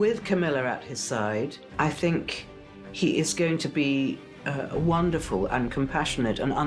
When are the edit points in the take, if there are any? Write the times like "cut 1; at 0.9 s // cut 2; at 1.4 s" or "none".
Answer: cut 1; at 1.6 s

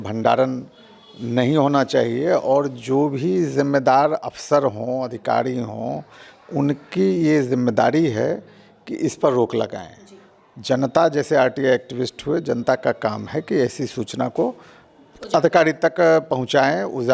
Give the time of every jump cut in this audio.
none

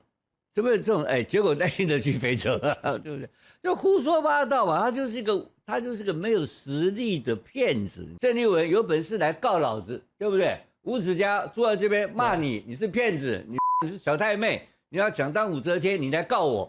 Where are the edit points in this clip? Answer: cut 1; at 8.0 s

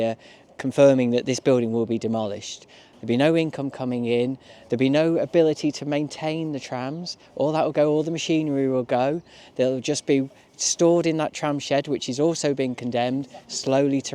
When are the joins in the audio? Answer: cut 1; at 2.9 s

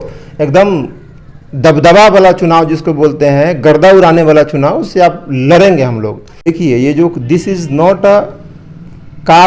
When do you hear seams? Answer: cut 1; at 6.3 s

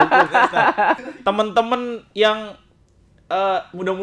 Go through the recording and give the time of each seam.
cut 1; at 1.0 s

